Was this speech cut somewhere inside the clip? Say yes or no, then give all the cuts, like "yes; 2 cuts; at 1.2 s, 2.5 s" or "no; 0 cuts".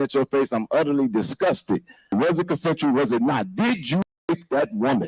yes; 1 cut; at 2.1 s